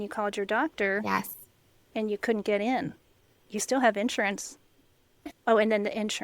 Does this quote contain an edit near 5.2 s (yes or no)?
yes